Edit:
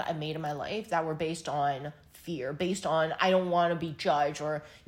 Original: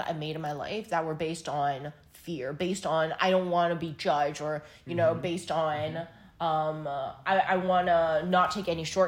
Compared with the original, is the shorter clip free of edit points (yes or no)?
yes